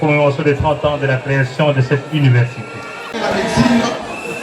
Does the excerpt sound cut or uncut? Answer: cut